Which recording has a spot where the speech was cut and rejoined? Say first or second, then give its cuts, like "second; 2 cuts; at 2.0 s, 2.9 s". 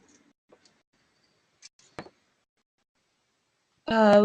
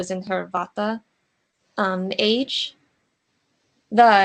second; 1 cut; at 2.0 s